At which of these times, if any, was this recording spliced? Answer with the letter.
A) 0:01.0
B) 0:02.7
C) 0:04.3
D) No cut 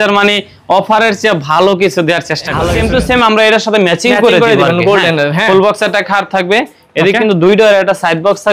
B